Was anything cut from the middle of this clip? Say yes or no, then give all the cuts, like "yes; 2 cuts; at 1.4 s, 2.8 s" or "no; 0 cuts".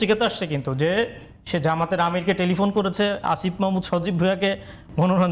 no; 0 cuts